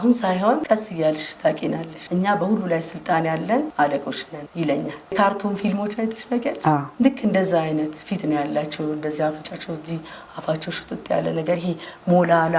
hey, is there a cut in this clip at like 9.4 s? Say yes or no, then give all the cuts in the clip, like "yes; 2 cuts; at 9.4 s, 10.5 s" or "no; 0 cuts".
no; 1 cut; at 5.1 s